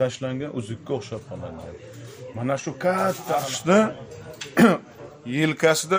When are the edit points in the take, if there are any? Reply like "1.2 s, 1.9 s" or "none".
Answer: 3.5 s